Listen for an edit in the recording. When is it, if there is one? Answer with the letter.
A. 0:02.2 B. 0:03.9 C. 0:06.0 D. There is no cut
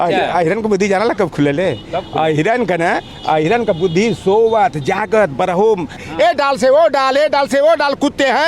C